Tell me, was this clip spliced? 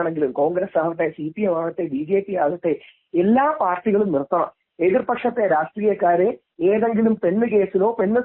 no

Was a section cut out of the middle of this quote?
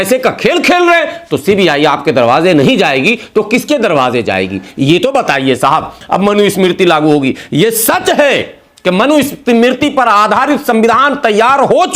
yes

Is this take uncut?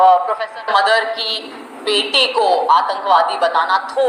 yes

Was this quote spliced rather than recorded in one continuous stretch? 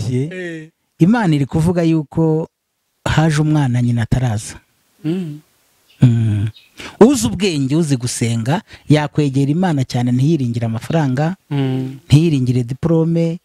no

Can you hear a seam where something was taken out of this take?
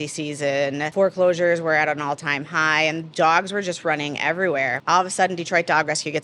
yes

